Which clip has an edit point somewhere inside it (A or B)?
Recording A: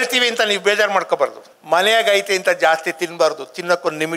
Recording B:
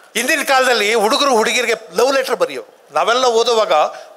A